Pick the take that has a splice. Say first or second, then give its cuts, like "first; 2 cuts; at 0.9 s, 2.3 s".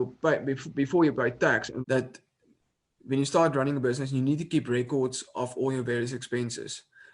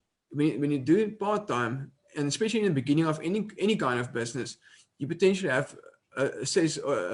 first; 1 cut; at 1.7 s